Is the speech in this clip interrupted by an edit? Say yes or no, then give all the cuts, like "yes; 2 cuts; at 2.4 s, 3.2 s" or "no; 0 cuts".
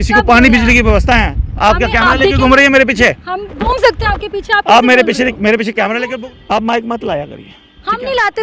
yes; 1 cut; at 6.0 s